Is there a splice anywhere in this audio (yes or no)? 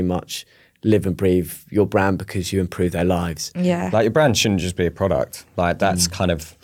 yes